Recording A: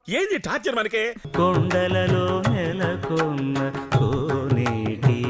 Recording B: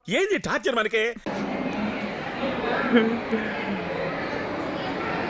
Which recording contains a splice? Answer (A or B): A